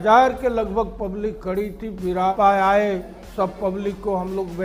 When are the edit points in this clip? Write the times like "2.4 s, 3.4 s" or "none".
2.3 s